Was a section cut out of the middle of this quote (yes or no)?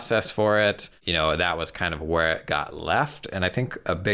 yes